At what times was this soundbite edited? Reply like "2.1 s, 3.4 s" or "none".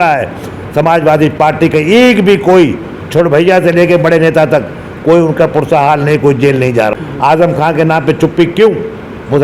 6.9 s